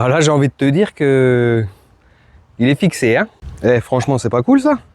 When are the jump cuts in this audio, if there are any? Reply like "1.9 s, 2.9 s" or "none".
3.4 s